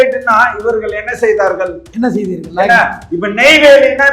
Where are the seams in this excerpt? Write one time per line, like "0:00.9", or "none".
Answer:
0:01.8